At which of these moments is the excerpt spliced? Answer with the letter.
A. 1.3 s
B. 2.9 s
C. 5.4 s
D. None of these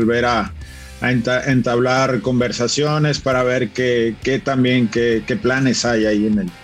D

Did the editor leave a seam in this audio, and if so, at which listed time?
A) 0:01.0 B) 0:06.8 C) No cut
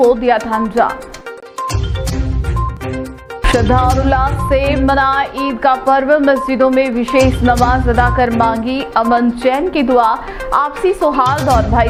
C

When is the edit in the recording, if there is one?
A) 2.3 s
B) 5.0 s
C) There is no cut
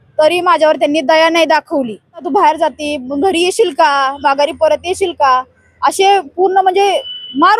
A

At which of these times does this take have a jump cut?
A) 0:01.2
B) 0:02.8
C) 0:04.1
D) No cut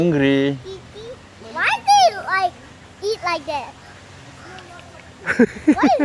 D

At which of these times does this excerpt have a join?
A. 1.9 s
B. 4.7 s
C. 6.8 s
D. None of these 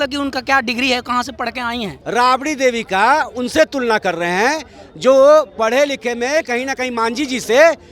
A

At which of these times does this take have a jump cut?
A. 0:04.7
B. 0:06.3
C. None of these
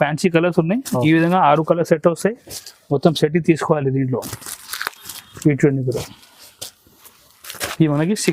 C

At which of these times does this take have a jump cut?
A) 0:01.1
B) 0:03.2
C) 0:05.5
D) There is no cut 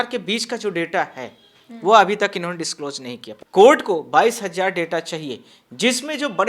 B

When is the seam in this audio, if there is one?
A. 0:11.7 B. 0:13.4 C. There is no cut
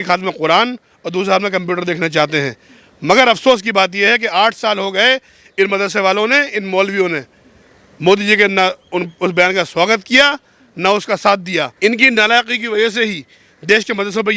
A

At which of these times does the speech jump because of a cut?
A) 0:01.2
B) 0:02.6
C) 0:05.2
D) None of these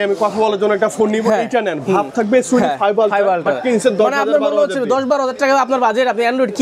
D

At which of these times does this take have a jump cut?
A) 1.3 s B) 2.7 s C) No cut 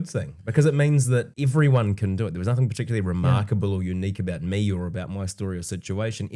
A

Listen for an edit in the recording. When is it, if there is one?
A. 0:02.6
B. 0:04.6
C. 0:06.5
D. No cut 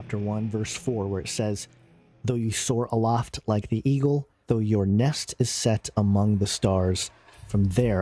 B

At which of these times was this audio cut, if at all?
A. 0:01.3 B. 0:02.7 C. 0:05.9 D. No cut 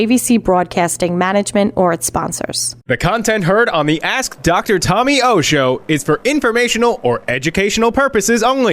B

